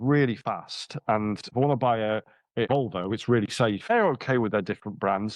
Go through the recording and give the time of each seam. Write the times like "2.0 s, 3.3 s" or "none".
1.5 s, 2.7 s, 3.9 s

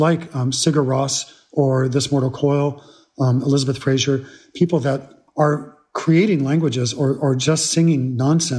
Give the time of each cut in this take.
5.2 s

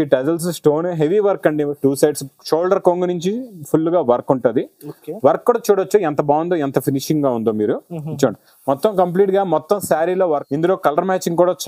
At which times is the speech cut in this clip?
10.4 s

